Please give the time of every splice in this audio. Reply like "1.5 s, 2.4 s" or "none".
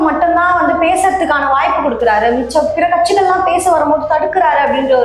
none